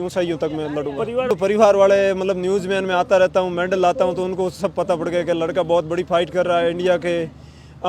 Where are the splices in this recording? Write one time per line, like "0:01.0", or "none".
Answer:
0:01.3